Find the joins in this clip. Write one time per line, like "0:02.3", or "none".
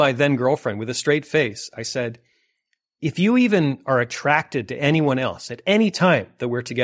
none